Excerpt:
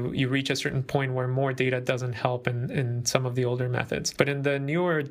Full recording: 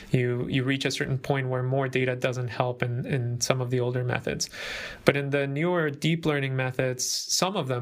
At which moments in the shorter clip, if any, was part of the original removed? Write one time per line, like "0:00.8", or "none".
0:04.1